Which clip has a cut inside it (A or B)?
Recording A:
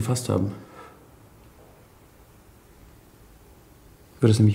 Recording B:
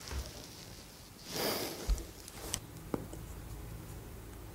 B